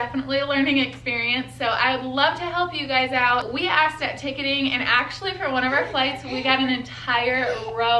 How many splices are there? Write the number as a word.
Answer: one